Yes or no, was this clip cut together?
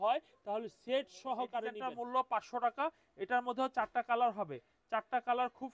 yes